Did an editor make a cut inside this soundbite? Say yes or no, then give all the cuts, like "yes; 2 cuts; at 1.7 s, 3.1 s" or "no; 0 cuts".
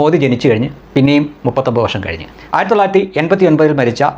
yes; 1 cut; at 2.2 s